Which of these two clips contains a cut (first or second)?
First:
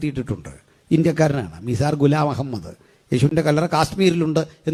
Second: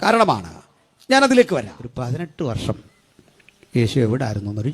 second